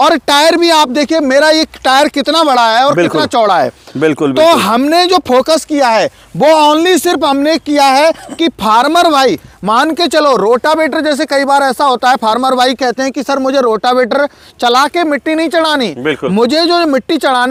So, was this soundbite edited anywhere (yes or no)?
no